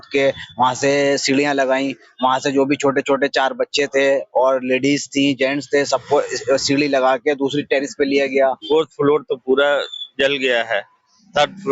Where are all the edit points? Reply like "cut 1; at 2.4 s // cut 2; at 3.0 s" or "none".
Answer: cut 1; at 8.6 s